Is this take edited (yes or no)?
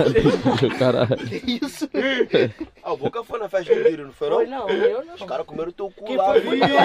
no